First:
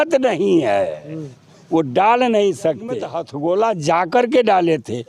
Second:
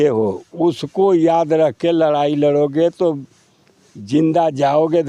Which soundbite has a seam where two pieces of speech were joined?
first; 1 cut; at 3.2 s

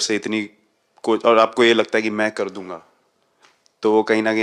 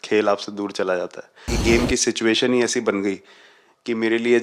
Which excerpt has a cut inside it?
second; 1 cut; at 1.6 s

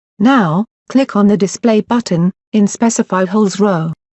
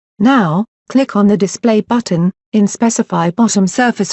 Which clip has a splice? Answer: first; 1 cut; at 3.1 s

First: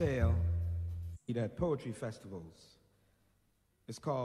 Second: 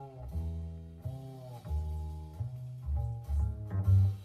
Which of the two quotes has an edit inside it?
first; 1 cut; at 1.3 s

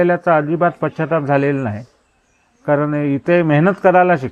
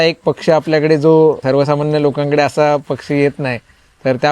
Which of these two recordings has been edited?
second; 1 cut; at 1.4 s

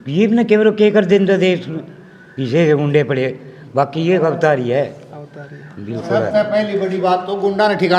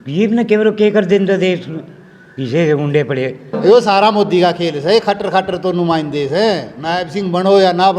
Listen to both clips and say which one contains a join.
second; 2 cuts; at 3.5 s, 6.7 s

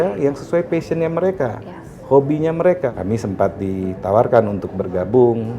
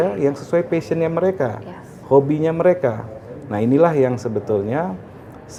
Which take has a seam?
first; 1 cut; at 2.9 s

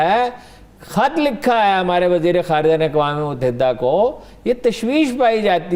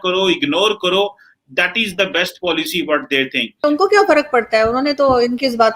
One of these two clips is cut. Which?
second; 1 cut; at 3.6 s

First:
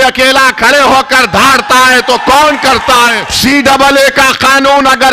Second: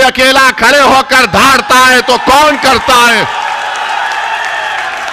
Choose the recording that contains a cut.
first; 1 cut; at 3.3 s

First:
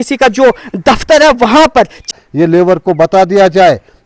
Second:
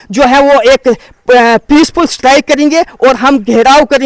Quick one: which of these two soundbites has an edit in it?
first; 1 cut; at 2.1 s

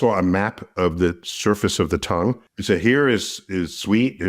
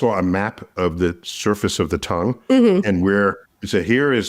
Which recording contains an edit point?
first; 1 cut; at 2.4 s

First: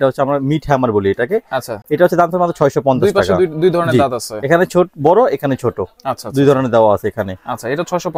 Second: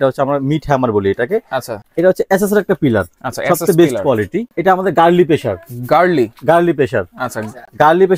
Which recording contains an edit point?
second; 2 cuts; at 1.7 s, 4.5 s

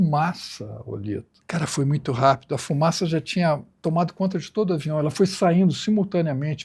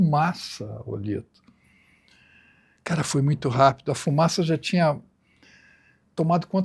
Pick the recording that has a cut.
first; 2 cuts; at 1.4 s, 3.7 s

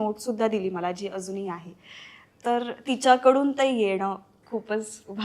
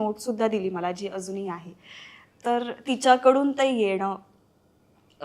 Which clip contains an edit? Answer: first; 1 cut; at 4.3 s

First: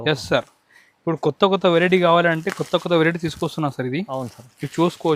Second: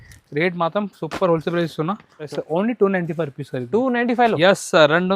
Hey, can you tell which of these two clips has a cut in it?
second; 1 cut; at 2.2 s

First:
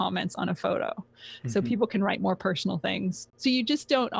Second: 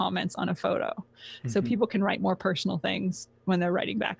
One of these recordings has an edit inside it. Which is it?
first; 1 cut; at 3.3 s

